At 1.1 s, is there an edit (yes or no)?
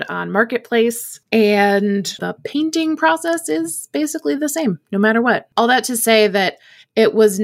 yes